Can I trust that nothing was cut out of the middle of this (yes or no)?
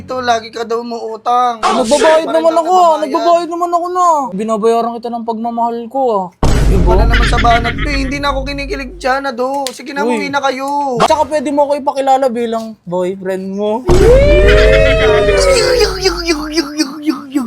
no